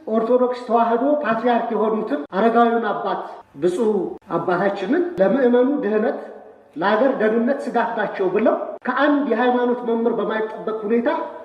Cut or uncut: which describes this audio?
cut